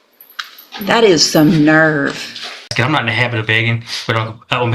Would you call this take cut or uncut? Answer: cut